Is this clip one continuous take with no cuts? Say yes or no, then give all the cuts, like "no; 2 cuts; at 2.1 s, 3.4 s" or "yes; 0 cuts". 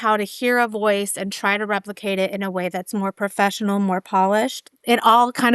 yes; 0 cuts